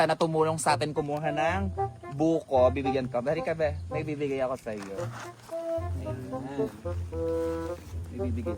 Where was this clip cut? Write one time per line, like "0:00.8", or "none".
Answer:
none